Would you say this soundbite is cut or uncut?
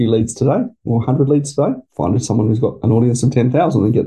cut